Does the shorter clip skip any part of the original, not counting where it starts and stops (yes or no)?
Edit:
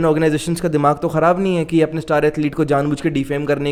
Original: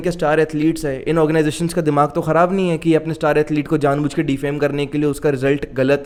no